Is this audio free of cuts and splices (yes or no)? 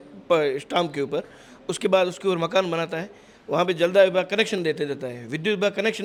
yes